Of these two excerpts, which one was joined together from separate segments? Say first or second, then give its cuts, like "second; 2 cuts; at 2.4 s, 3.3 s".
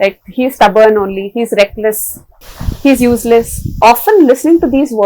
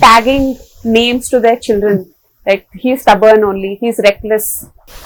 first; 1 cut; at 3.8 s